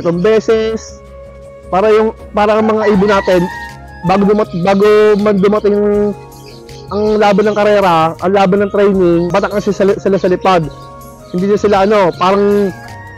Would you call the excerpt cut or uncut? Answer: cut